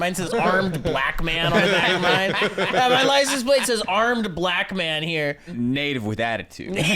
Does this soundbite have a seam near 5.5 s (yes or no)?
yes